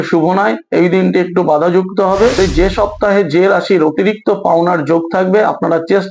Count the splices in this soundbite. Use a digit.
1